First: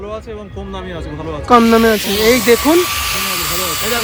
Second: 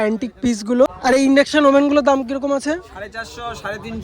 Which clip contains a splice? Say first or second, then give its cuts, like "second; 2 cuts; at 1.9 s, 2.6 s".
second; 1 cut; at 1.0 s